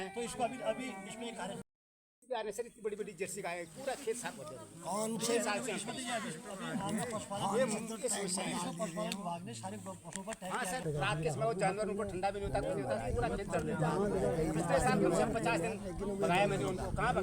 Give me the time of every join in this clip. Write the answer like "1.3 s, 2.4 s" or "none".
1.6 s, 10.8 s